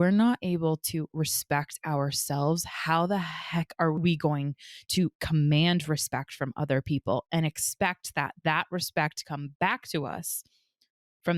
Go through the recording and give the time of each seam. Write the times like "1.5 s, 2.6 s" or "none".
4.0 s